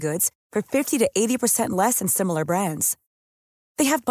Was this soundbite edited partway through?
no; 0 cuts

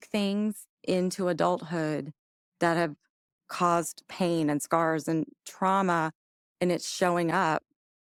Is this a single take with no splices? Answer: yes; 0 cuts

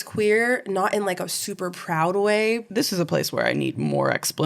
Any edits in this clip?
yes; 1 cut; at 2.6 s

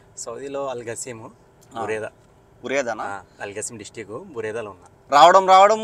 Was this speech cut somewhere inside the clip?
no; 0 cuts

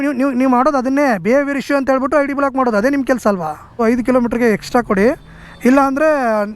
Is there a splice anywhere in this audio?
yes; 1 cut; at 3.8 s

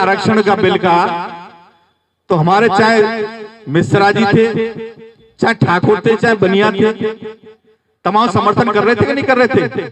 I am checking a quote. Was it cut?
no; 0 cuts

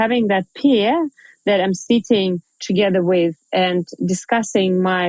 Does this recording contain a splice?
no; 0 cuts

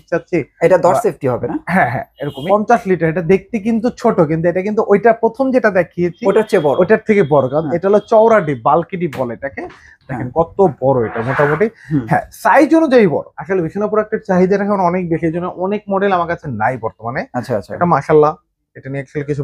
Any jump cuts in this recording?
yes; 2 cuts; at 2.4 s, 13.3 s

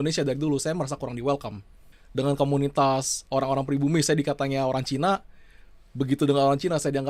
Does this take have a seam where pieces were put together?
no; 0 cuts

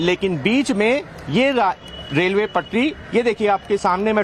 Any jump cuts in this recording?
no; 0 cuts

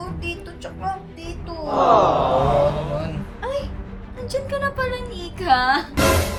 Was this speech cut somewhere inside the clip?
no; 0 cuts

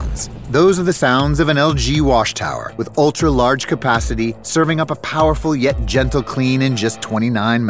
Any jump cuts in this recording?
no; 0 cuts

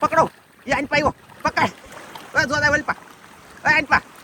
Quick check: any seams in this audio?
no; 0 cuts

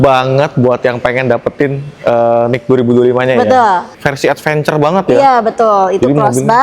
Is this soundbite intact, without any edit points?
no; 1 cut; at 3.9 s

